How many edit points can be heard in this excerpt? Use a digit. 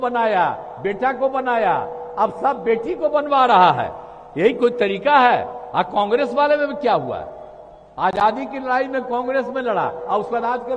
0